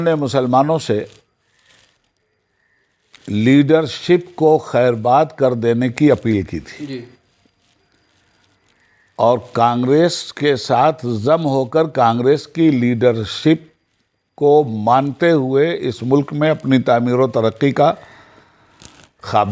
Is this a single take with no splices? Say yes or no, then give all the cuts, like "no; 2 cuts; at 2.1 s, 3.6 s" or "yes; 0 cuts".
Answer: yes; 0 cuts